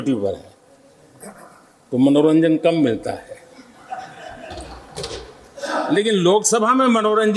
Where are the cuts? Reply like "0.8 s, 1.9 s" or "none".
none

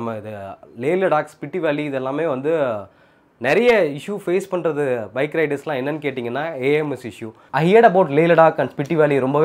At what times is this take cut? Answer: 7.5 s

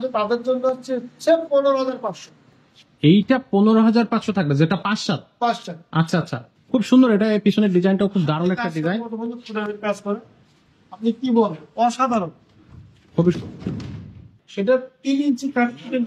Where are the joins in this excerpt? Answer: 6.4 s, 14.3 s

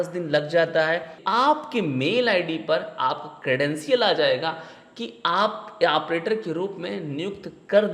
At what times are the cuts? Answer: 1.2 s

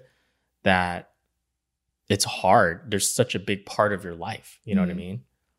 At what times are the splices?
none

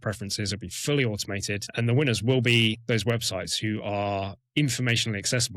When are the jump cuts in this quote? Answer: 1.7 s, 2.8 s, 4.4 s

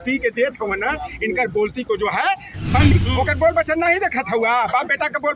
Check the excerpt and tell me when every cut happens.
3.0 s

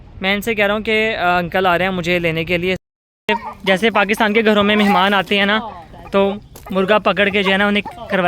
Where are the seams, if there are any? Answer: 2.8 s

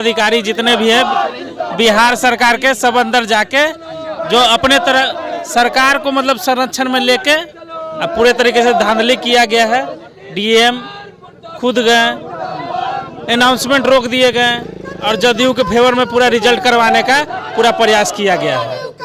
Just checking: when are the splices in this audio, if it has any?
none

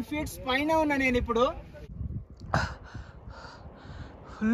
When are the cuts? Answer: 2.0 s

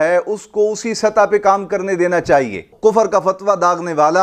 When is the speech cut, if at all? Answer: 2.7 s

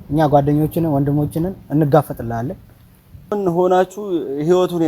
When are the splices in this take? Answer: 3.3 s

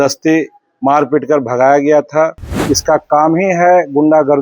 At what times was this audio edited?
2.5 s

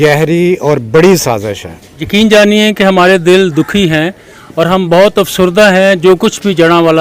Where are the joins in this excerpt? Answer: 2.0 s

